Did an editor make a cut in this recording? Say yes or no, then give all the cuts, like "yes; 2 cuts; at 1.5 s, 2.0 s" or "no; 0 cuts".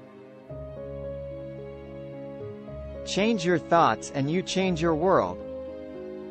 no; 0 cuts